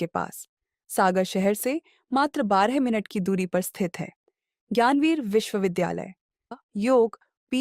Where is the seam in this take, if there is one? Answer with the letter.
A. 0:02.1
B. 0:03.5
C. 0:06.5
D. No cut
C